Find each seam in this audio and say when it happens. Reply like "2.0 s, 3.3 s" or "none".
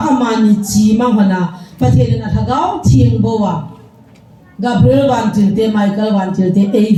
none